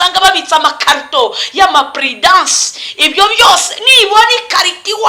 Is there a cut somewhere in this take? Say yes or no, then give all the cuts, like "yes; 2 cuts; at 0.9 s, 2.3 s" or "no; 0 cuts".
no; 0 cuts